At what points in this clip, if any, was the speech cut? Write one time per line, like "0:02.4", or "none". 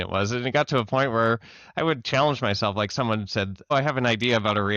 0:03.7